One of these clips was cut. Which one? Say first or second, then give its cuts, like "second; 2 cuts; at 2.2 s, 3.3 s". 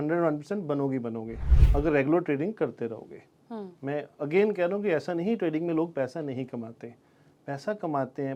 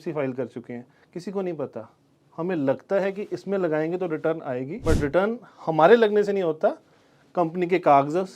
second; 1 cut; at 4.7 s